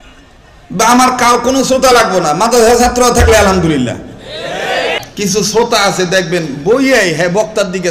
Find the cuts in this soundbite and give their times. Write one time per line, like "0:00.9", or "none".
0:05.0